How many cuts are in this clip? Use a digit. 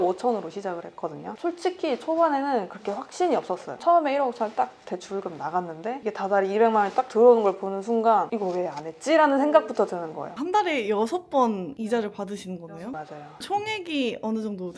2